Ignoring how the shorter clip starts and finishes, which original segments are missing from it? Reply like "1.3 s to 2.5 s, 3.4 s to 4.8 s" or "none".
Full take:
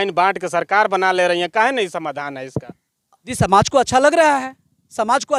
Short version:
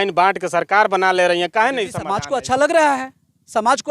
2.1 s to 3.6 s